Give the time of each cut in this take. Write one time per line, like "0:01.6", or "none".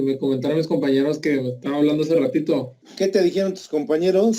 0:02.8